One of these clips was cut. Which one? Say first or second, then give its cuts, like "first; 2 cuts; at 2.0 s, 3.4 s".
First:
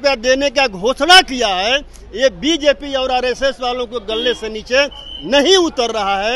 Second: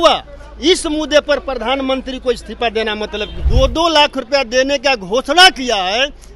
second; 1 cut; at 3.4 s